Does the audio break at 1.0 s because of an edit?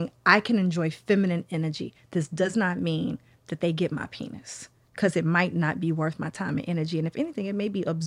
no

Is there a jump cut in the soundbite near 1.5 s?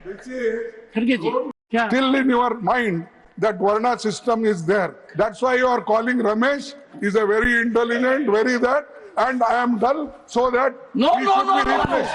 yes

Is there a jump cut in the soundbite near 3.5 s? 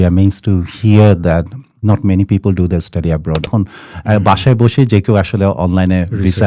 yes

